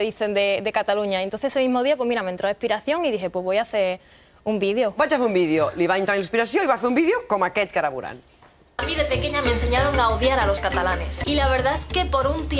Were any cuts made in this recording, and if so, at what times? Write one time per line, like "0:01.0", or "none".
0:08.2